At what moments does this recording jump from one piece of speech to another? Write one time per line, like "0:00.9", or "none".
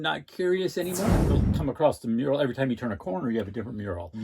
0:01.3